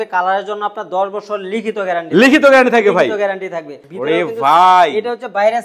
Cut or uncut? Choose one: cut